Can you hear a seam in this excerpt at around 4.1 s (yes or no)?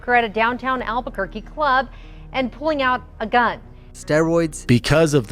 yes